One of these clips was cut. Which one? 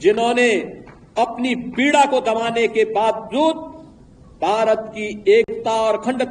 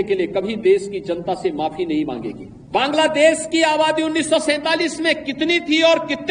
second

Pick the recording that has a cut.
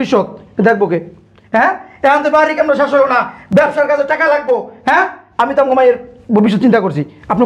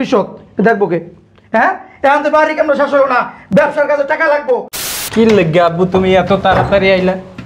second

